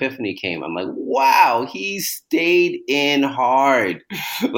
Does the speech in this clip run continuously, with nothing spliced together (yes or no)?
yes